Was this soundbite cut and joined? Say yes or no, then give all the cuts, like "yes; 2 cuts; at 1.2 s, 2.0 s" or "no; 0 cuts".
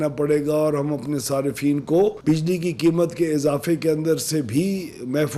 no; 0 cuts